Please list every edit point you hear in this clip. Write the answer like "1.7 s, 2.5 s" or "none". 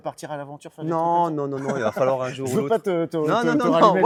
none